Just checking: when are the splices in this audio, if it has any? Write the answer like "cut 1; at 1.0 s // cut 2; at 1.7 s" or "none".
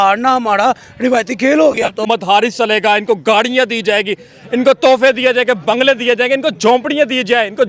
cut 1; at 2.1 s